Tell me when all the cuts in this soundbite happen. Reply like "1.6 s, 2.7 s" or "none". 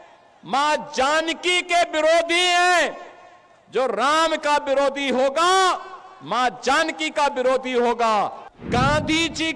8.5 s